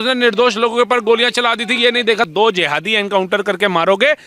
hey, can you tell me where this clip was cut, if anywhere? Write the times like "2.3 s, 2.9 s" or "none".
2.3 s